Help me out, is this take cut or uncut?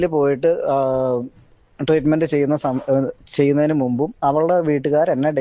uncut